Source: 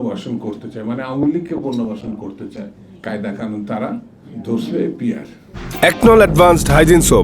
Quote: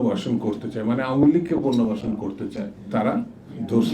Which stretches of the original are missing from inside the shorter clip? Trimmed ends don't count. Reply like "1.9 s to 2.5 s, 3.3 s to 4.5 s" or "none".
2.9 s to 3.6 s